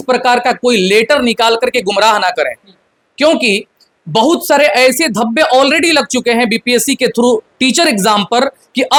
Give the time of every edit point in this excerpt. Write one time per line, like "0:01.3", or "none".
none

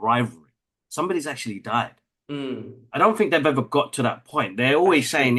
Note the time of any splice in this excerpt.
none

